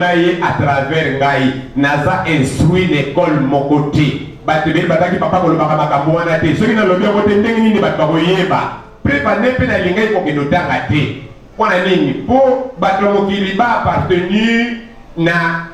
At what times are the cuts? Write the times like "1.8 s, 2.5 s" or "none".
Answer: none